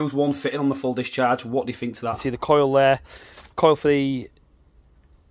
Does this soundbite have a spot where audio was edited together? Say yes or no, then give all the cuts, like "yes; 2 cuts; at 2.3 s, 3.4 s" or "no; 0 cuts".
yes; 1 cut; at 2.2 s